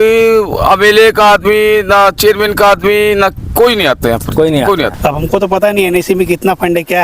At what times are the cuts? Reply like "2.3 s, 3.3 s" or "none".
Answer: 4.9 s

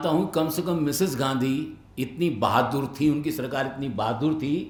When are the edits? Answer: none

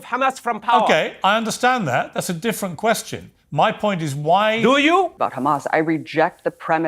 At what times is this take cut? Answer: 5.2 s

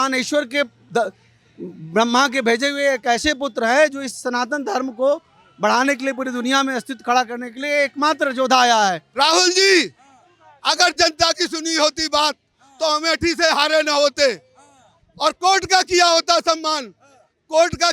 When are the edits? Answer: 9.0 s

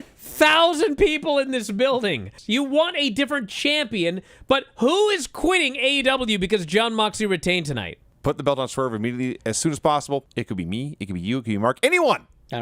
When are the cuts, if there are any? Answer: 2.3 s, 8.0 s, 9.4 s

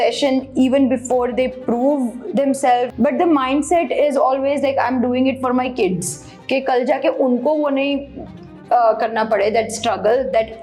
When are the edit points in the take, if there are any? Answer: 2.9 s

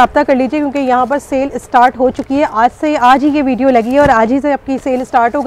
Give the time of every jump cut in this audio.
none

